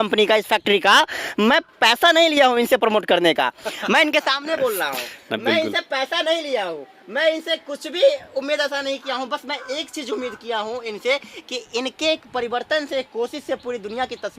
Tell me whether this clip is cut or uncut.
uncut